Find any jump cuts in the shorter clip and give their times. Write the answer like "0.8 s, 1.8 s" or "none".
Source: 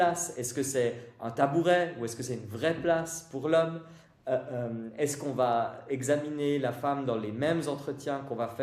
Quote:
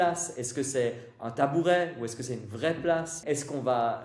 3.2 s